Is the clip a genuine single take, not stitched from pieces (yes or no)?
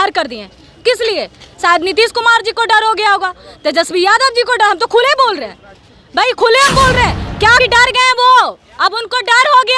no